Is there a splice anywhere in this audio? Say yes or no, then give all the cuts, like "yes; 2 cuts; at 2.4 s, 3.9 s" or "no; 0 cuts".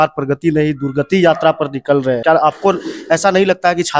yes; 1 cut; at 2.2 s